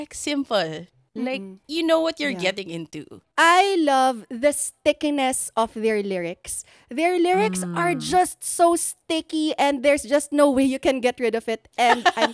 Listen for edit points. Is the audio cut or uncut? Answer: cut